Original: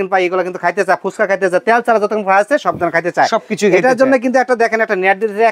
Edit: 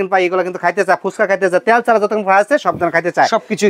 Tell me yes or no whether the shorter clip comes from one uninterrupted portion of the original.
yes